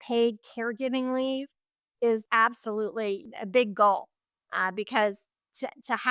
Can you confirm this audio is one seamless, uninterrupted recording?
no; 2 cuts; at 2.2 s, 3.2 s

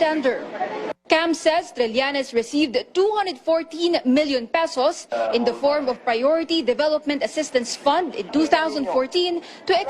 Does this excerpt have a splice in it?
yes; 1 cut; at 5.6 s

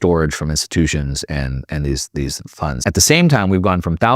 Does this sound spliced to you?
yes; 1 cut; at 2.8 s

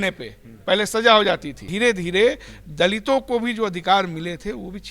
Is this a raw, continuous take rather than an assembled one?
no; 1 cut; at 1.6 s

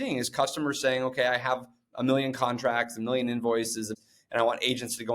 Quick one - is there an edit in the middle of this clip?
yes; 1 cut; at 3.9 s

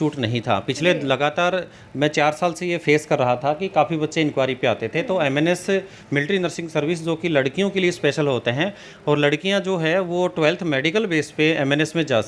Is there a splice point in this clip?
no; 0 cuts

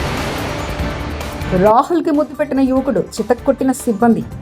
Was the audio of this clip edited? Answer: yes; 1 cut; at 1.5 s

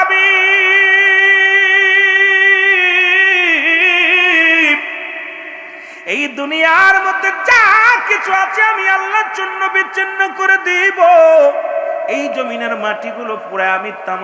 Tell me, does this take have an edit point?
no; 0 cuts

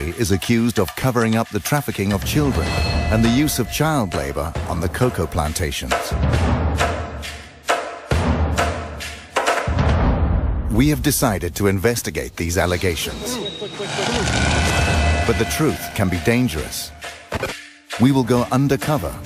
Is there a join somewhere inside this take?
no; 0 cuts

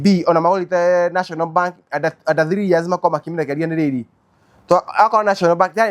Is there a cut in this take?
no; 0 cuts

